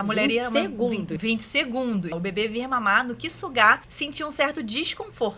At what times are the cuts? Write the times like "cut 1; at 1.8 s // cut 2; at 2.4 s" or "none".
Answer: cut 1; at 1.2 s // cut 2; at 2.2 s // cut 3; at 4.0 s